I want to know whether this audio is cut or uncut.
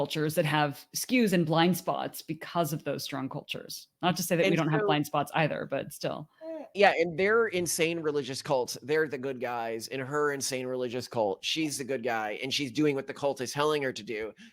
cut